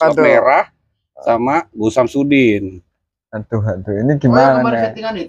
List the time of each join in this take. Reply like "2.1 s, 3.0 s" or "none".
none